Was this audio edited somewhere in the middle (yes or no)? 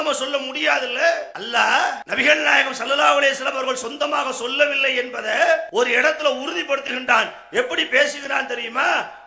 yes